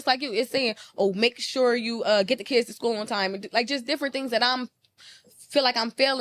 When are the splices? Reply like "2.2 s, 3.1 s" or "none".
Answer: none